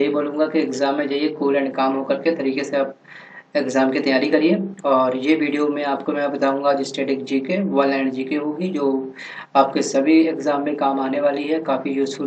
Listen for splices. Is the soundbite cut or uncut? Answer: cut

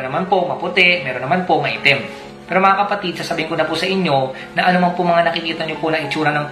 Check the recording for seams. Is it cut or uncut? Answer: cut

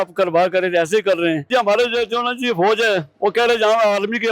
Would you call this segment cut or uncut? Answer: cut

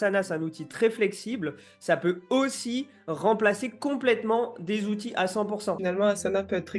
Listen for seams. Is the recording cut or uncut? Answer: cut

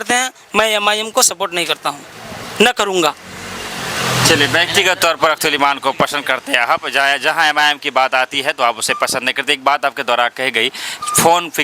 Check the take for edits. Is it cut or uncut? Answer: uncut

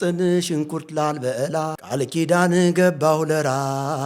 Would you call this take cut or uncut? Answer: cut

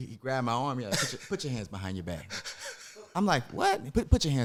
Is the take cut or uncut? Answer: uncut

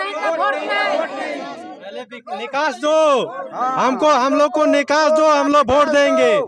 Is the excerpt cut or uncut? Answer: uncut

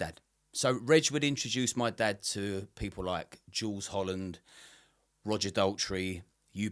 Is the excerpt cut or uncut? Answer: uncut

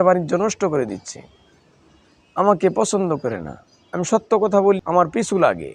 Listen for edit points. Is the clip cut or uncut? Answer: cut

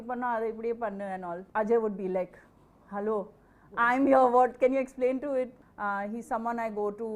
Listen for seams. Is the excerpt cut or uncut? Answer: cut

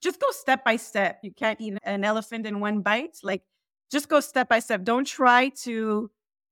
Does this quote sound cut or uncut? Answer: cut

